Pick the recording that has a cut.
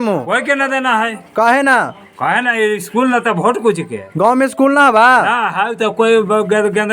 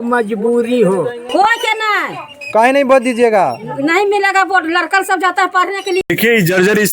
second; 2 cuts; at 1.2 s, 6.0 s

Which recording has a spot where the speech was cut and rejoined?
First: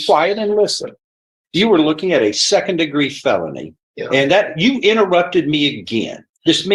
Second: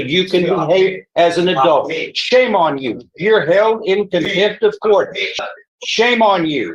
second; 1 cut; at 5.4 s

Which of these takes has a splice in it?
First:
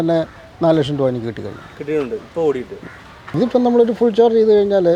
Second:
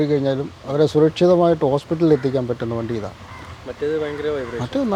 first; 1 cut; at 3.3 s

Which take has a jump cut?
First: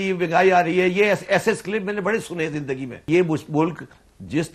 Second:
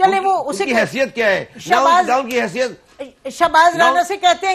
first; 1 cut; at 3.1 s

